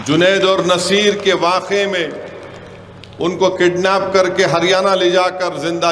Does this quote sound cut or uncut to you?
uncut